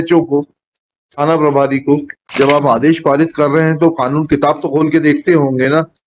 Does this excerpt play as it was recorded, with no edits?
no; 1 cut; at 2.2 s

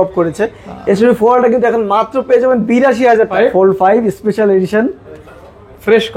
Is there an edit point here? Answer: yes; 1 cut; at 3.3 s

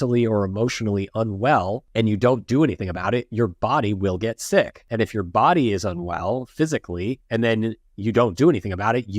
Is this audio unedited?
no; 3 cuts; at 1.8 s, 4.8 s, 7.2 s

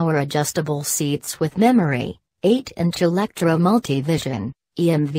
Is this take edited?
yes; 1 cut; at 2.4 s

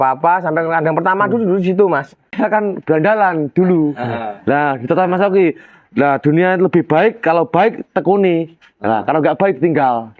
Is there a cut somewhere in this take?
yes; 1 cut; at 2.3 s

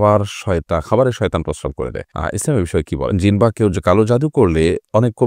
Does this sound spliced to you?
yes; 2 cuts; at 2.1 s, 3.2 s

